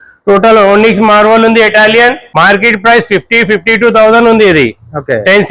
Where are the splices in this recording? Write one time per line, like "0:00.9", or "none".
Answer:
0:02.2